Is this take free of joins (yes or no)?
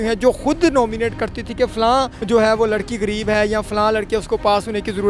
no